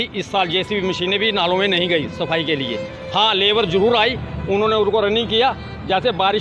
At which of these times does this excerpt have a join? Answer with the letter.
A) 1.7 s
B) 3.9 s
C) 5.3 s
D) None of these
D